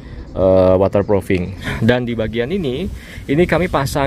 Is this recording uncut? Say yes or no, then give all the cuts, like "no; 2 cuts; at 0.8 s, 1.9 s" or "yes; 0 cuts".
no; 1 cut; at 1.7 s